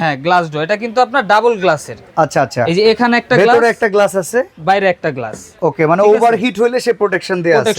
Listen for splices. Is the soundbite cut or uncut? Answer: uncut